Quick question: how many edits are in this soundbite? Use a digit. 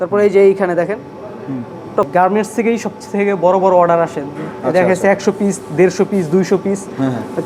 1